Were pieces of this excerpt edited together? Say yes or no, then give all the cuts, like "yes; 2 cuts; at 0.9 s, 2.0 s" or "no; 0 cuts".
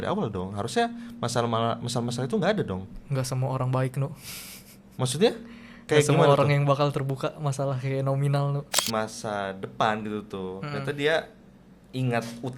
yes; 1 cut; at 8.8 s